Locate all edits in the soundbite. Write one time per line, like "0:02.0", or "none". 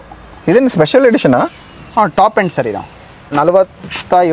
0:03.3